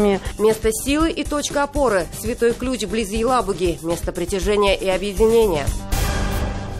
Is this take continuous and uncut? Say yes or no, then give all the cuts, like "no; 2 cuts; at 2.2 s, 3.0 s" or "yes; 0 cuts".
no; 1 cut; at 5.7 s